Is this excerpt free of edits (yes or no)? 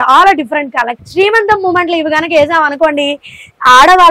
no